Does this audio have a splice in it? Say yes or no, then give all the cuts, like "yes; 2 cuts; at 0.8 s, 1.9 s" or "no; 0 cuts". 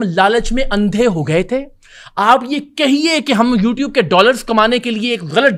no; 0 cuts